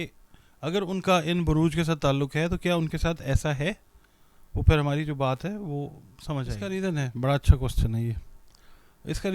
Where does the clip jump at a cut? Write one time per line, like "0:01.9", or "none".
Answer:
0:06.6